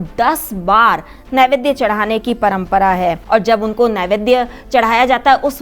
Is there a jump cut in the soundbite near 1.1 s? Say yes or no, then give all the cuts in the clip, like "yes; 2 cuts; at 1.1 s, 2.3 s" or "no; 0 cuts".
no; 1 cut; at 3.2 s